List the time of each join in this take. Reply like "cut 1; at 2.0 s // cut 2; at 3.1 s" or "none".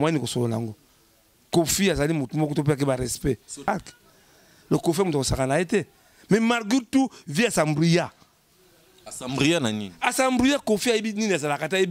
cut 1; at 3.7 s